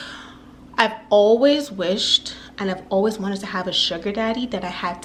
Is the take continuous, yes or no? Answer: yes